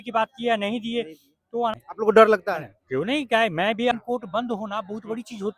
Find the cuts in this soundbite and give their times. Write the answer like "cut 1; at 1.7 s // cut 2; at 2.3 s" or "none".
cut 1; at 1.8 s // cut 2; at 3.9 s